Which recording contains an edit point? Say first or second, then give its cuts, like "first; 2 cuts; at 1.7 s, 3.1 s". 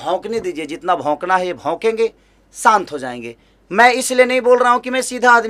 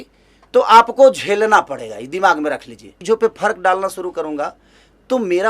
second; 1 cut; at 2.9 s